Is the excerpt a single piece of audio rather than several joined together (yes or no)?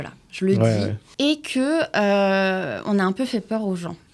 no